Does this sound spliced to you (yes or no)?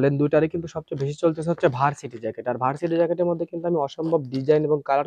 no